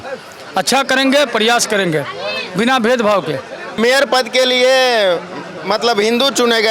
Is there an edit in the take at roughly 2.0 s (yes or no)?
no